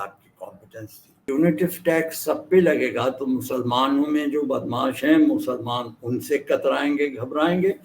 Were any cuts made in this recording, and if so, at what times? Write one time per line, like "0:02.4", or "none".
0:01.2